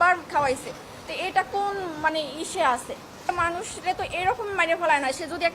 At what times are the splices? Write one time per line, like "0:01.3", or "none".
0:03.2